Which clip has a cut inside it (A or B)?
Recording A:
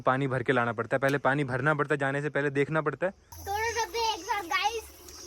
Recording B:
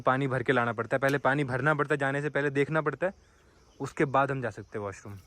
A